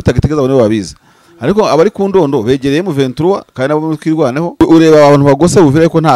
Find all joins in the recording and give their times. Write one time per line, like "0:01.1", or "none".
0:04.6